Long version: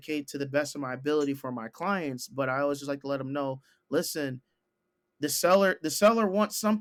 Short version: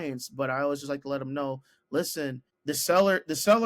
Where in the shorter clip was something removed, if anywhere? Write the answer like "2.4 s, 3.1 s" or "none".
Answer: 2.5 s